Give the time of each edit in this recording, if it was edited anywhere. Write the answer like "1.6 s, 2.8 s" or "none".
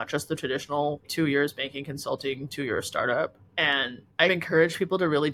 none